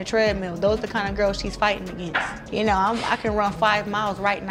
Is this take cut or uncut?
uncut